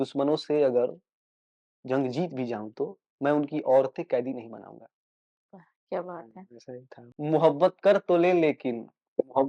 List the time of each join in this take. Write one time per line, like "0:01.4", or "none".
0:07.0